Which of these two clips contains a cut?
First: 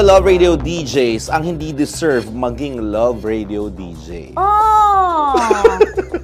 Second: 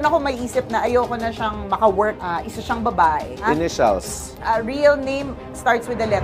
second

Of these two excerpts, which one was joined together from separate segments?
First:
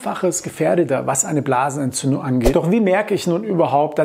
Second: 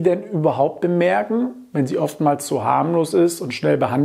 first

